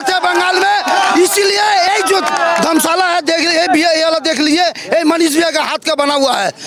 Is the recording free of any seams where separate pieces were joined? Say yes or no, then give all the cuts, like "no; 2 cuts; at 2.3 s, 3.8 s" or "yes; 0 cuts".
yes; 0 cuts